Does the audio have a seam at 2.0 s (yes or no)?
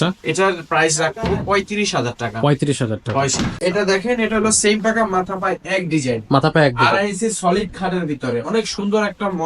no